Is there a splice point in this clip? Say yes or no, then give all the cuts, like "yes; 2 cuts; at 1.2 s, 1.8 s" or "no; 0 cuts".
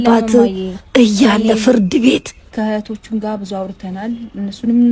yes; 1 cut; at 2.5 s